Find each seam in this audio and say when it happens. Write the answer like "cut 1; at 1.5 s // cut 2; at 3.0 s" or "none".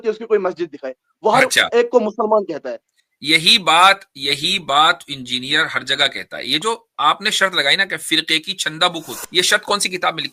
cut 1; at 9.2 s